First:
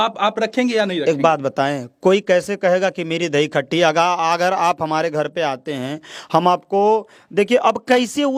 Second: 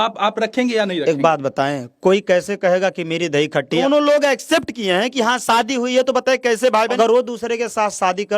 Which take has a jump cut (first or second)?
second